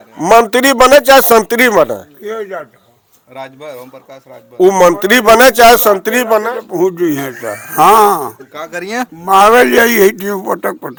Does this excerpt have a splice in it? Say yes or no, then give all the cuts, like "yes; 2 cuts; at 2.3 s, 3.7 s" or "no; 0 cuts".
no; 0 cuts